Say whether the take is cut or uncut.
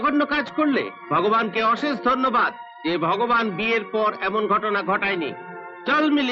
uncut